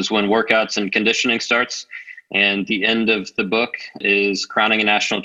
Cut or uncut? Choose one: cut